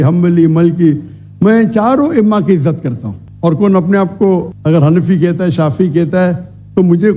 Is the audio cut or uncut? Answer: uncut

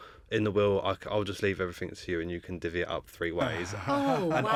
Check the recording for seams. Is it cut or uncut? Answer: uncut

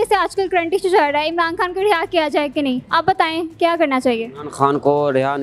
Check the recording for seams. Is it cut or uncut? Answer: uncut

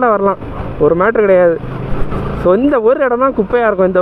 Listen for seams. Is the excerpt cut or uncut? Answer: uncut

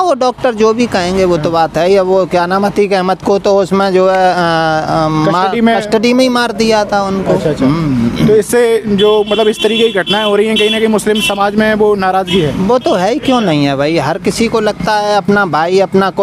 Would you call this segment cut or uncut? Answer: uncut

